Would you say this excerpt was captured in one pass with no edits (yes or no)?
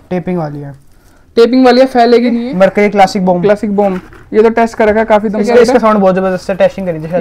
no